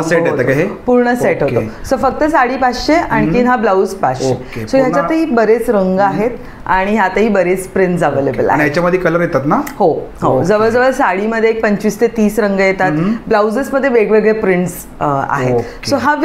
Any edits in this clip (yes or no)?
no